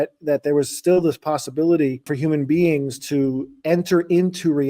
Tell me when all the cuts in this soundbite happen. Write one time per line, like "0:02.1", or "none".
0:02.1